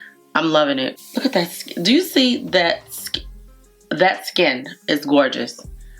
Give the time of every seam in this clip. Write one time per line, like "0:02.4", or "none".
0:01.0